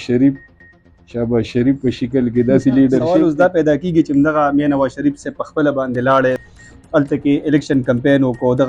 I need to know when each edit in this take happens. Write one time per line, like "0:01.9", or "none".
0:03.1
0:06.4